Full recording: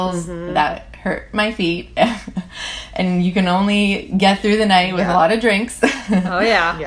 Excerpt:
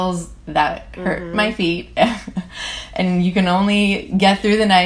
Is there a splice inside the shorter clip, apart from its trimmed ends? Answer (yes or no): no